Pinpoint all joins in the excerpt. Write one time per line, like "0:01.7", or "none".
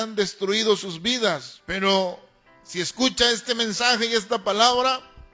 0:01.6